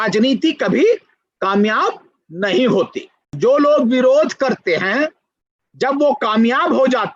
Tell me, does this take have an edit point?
yes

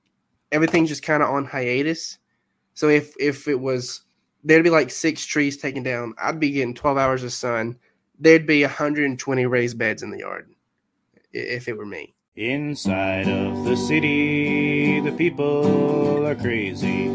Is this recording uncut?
no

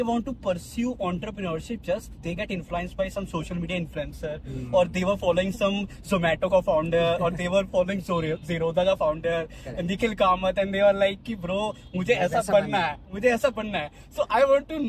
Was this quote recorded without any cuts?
yes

